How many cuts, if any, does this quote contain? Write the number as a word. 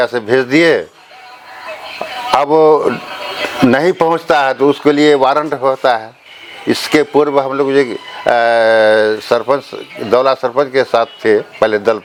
zero